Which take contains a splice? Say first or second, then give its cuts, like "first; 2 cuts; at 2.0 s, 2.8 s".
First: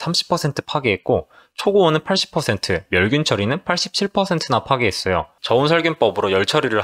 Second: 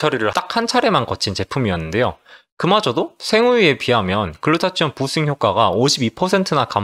first; 1 cut; at 5.3 s